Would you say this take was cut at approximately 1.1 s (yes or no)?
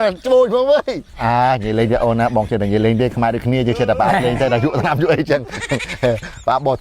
yes